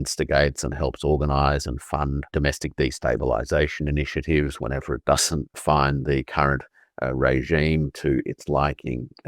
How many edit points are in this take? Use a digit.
2